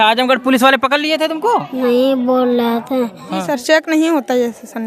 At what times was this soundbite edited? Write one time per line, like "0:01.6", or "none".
0:03.5